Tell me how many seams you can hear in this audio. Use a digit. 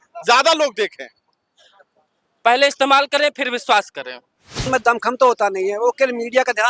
1